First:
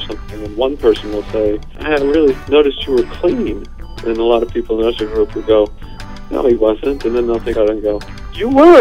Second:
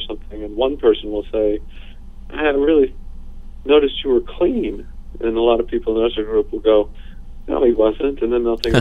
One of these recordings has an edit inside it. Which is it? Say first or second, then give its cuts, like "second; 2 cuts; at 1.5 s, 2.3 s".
first; 3 cuts; at 1.7 s, 2.4 s, 7.5 s